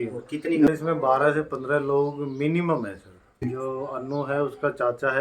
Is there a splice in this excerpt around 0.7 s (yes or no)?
yes